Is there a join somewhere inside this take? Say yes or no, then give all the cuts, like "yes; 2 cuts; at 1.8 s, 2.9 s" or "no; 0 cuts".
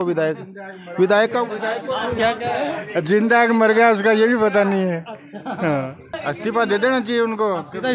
yes; 1 cut; at 6.0 s